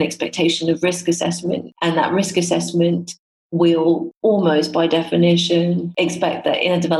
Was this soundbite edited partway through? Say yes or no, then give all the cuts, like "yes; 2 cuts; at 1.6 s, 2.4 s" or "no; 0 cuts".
yes; 3 cuts; at 1.7 s, 4.1 s, 5.9 s